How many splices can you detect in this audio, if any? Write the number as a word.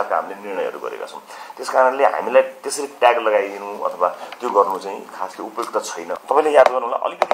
one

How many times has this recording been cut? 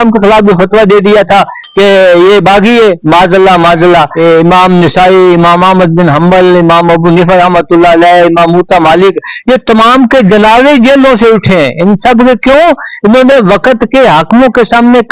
one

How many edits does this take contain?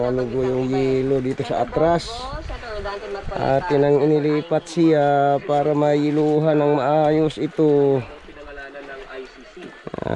zero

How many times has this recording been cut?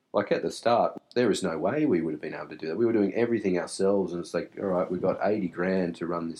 one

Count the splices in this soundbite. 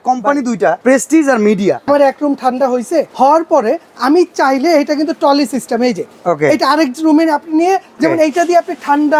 four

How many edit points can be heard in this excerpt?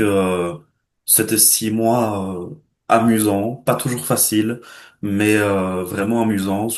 zero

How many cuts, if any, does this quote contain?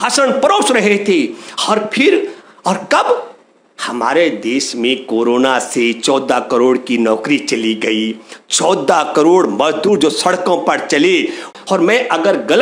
one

